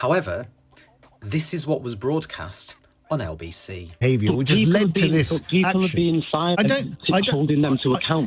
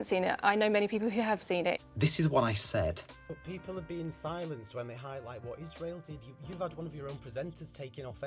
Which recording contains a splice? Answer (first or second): second